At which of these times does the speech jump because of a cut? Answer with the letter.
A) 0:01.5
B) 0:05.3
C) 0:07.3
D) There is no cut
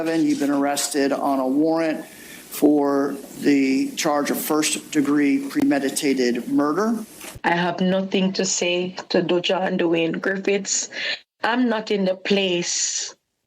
C